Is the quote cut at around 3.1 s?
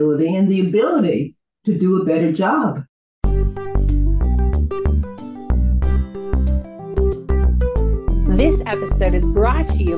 yes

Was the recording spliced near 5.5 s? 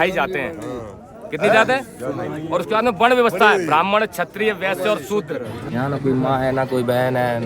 yes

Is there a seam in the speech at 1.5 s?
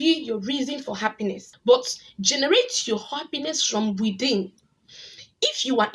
yes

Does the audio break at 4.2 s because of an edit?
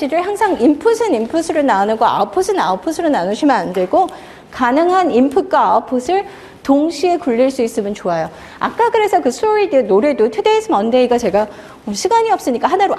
no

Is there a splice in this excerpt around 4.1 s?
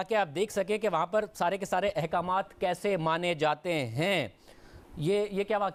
no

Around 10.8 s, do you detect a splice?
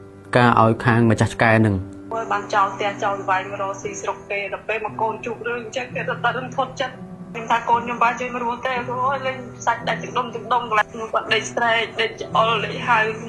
yes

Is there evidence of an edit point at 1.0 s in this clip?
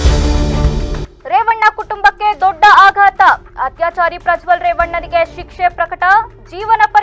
yes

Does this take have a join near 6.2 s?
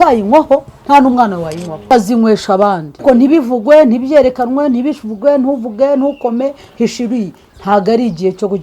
no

